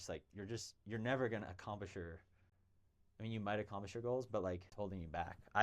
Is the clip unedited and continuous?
no; 1 cut; at 4.7 s

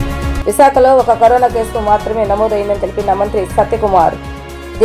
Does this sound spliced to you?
no; 0 cuts

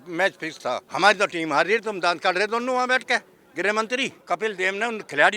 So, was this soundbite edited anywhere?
yes; 2 cuts; at 0.9 s, 4.2 s

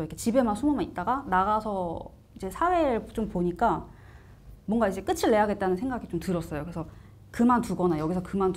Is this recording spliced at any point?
no; 0 cuts

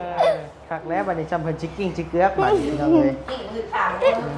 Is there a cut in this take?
no; 0 cuts

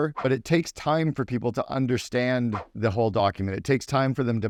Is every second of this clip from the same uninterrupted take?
yes; 0 cuts

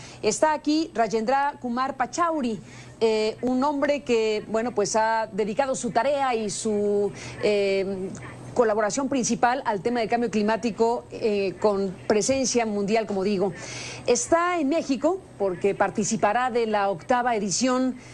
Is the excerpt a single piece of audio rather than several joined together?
yes; 0 cuts

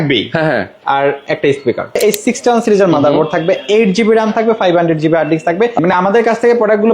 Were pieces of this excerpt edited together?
yes; 2 cuts; at 2.0 s, 5.8 s

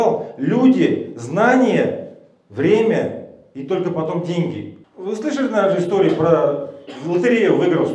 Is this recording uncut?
no; 1 cut; at 4.7 s

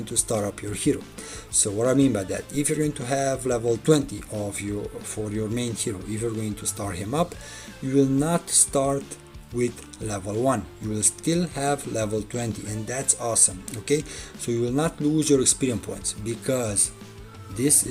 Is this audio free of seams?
yes; 0 cuts

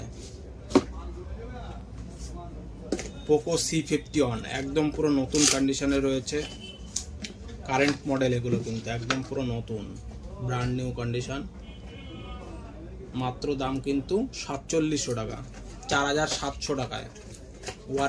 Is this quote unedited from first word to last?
yes; 0 cuts

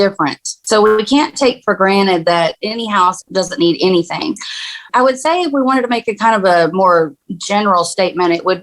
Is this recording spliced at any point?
yes; 1 cut; at 2.6 s

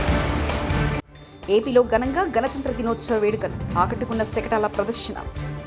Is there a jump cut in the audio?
yes; 1 cut; at 1.2 s

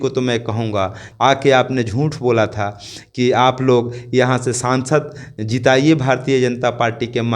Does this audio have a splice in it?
yes; 1 cut; at 1.0 s

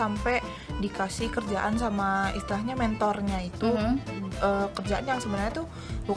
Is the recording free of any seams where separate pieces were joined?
yes; 0 cuts

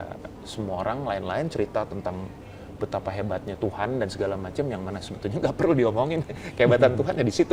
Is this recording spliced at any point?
no; 0 cuts

